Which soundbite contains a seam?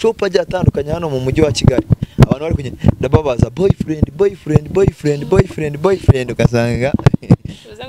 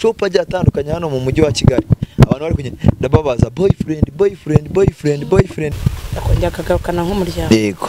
second; 1 cut; at 5.7 s

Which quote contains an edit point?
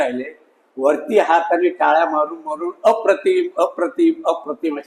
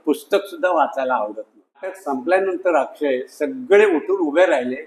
second; 1 cut; at 2.0 s

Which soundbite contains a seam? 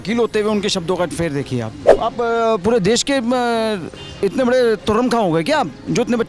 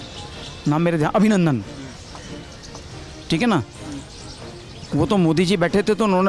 first; 1 cut; at 1.8 s

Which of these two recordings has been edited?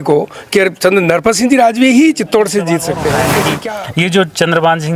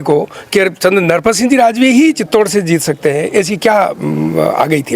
first; 1 cut; at 3.4 s

